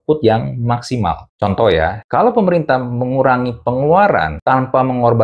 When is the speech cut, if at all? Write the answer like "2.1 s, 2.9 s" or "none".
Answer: 1.2 s, 2.0 s, 4.3 s